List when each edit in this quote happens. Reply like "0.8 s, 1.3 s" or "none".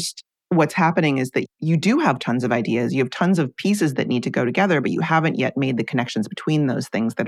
none